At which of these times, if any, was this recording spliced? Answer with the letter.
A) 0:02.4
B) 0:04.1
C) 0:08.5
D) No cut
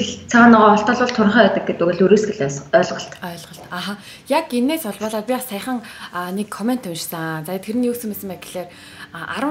D